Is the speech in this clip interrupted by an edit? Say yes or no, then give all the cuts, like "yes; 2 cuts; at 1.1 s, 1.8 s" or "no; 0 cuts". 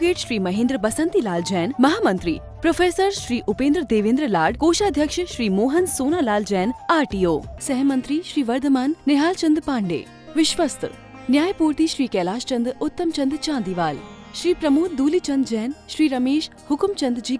no; 0 cuts